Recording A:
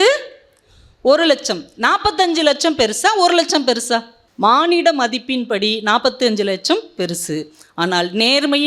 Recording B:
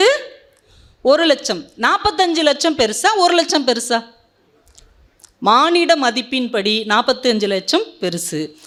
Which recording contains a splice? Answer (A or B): A